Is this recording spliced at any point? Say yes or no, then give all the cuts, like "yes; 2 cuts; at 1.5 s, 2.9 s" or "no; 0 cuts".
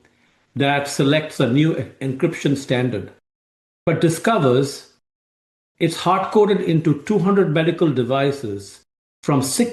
no; 0 cuts